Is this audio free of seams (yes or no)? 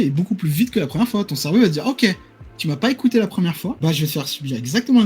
no